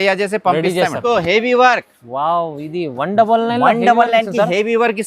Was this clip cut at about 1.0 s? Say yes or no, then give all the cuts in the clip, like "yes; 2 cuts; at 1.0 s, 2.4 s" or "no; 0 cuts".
yes; 1 cut; at 1.0 s